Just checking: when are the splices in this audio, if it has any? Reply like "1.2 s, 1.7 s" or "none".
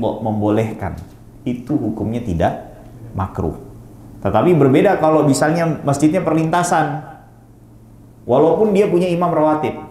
none

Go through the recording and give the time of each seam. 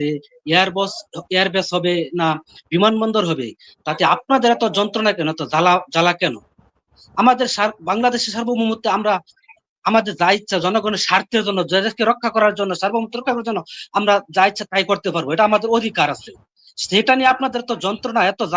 none

